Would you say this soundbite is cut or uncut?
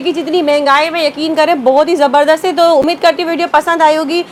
uncut